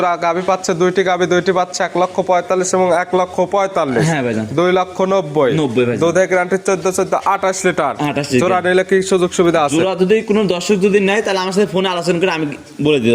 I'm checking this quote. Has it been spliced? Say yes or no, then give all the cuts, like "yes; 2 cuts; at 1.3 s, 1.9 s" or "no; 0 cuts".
no; 0 cuts